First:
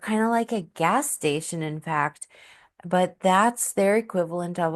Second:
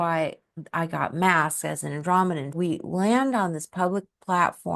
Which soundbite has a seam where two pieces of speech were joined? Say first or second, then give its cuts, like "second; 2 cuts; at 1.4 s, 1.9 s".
second; 1 cut; at 2.6 s